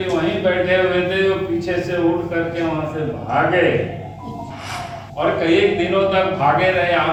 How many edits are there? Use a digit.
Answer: 0